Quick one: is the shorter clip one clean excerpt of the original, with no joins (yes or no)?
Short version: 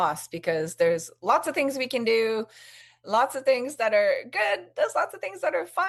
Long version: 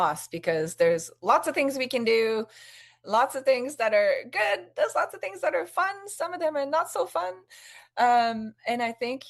yes